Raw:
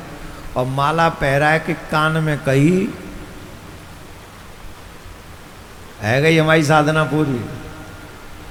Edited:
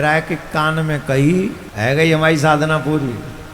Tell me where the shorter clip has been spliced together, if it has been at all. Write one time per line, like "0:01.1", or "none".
0:01.6